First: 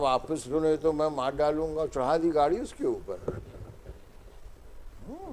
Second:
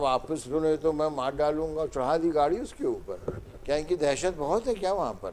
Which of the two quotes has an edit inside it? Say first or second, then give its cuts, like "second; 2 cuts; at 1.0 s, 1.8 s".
second; 1 cut; at 3.9 s